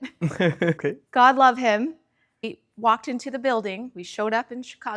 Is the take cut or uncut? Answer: cut